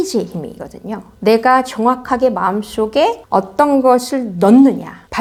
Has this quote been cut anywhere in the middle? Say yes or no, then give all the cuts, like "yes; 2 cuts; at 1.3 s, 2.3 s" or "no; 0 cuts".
no; 0 cuts